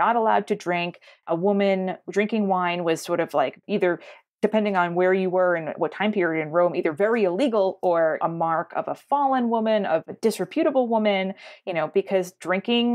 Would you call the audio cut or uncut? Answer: uncut